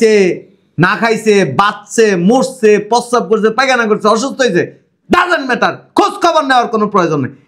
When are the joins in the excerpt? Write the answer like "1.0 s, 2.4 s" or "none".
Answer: none

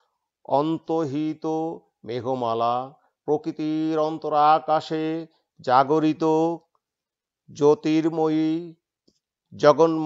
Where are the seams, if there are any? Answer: none

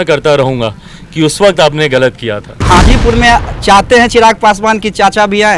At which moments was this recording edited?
2.5 s

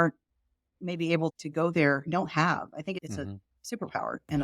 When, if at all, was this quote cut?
1.4 s, 3.0 s

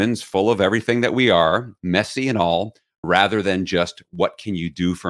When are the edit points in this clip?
none

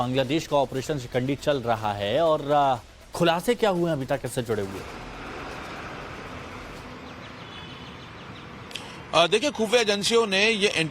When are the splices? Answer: 9.8 s

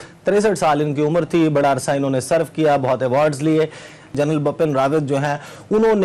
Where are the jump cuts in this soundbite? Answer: 4.2 s

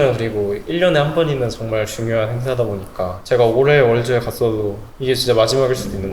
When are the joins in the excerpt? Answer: 3.2 s

